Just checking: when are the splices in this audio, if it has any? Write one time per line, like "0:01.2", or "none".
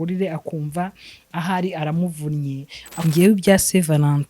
0:03.0